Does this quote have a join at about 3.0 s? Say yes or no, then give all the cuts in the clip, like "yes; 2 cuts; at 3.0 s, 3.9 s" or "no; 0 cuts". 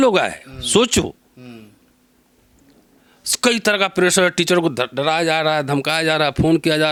no; 0 cuts